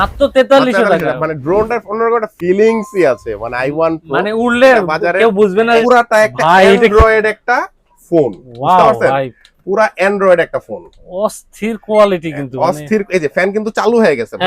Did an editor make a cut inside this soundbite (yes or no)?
yes